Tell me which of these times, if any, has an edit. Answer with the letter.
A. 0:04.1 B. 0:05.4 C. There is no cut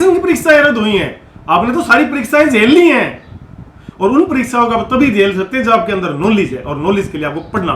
C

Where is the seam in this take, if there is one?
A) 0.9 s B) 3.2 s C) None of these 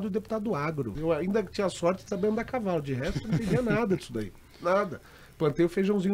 A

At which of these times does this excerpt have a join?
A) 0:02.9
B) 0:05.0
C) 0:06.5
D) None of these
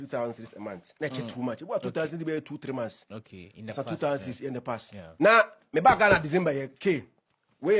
B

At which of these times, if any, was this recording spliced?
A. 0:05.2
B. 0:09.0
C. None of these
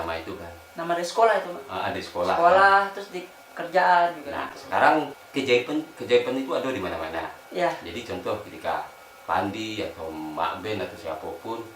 A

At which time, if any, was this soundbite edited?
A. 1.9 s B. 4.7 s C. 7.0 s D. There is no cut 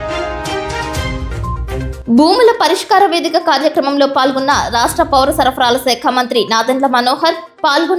A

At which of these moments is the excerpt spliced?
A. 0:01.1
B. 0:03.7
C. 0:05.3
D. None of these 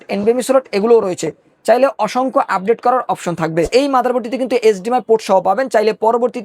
B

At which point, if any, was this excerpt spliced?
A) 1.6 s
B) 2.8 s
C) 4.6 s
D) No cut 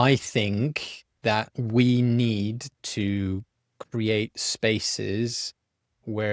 A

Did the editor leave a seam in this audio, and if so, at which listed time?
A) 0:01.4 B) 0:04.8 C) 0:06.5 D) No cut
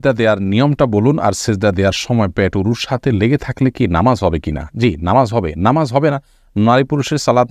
D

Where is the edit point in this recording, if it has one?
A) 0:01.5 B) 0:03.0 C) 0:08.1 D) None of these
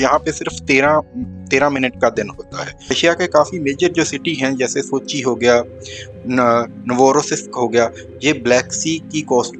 B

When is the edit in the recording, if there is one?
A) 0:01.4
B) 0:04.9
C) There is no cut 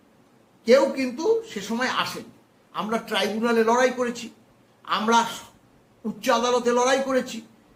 C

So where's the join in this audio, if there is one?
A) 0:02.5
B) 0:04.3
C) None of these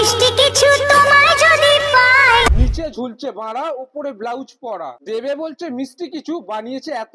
A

